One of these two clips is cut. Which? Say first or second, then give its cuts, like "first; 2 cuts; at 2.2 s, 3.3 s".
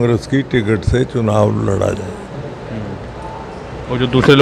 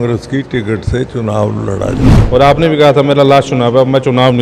second; 1 cut; at 2.1 s